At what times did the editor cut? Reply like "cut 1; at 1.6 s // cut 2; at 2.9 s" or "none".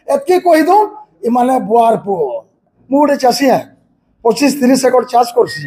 cut 1; at 2.7 s